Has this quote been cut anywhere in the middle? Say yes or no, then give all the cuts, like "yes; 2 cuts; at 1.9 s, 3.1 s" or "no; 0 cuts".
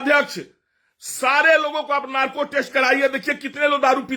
no; 0 cuts